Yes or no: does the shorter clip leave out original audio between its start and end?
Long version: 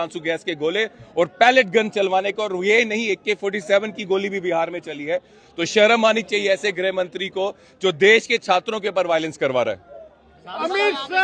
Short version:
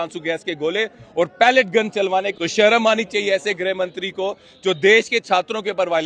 yes